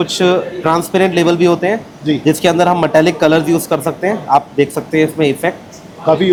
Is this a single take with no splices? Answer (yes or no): yes